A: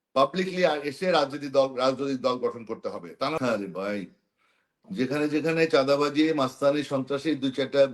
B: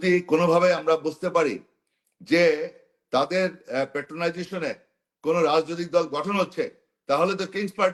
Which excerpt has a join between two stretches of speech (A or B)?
A